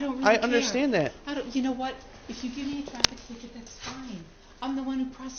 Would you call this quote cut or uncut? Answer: uncut